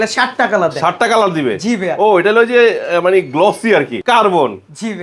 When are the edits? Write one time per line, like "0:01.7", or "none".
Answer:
0:04.0